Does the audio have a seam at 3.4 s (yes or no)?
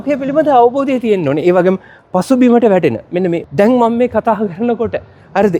yes